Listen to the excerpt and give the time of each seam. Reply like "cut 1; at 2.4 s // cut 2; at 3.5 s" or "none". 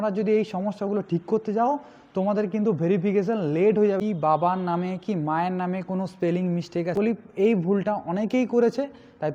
cut 1; at 4.0 s // cut 2; at 6.9 s